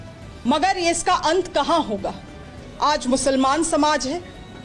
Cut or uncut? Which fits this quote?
uncut